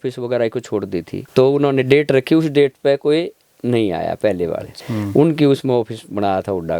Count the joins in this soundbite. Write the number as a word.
two